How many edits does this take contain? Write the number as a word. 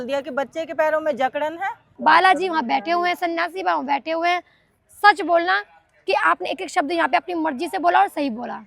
one